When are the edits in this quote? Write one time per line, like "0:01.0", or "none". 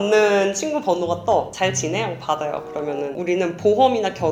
none